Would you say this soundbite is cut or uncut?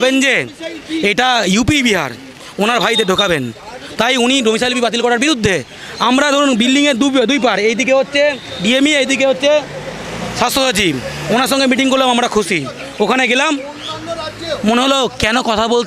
uncut